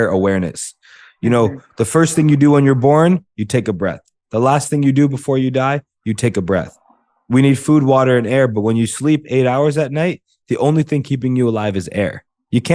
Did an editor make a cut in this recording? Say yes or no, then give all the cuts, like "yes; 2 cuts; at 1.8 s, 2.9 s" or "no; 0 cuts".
no; 0 cuts